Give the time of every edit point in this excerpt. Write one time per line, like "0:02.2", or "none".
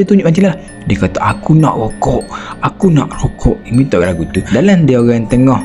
0:04.4